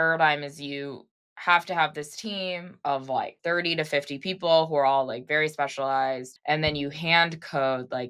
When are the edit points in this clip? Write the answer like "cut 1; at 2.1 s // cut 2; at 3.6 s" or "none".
cut 1; at 3.4 s // cut 2; at 6.3 s